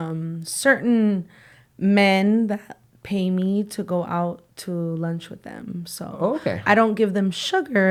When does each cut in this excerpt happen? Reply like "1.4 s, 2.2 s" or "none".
none